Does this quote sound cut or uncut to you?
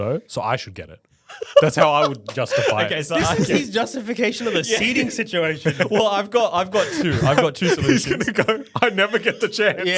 uncut